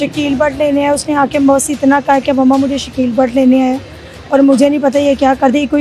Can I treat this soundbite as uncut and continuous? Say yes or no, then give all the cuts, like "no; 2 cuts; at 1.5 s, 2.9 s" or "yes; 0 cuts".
yes; 0 cuts